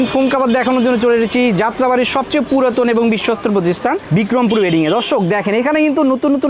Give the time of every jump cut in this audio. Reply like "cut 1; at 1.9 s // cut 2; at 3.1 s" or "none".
none